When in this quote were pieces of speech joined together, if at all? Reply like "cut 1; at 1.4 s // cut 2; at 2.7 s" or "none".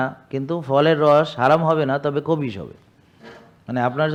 none